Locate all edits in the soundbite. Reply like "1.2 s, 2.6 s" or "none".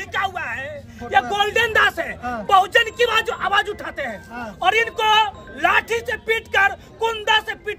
0.9 s